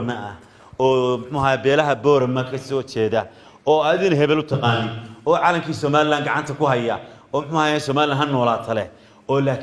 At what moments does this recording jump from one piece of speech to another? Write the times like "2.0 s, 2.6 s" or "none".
none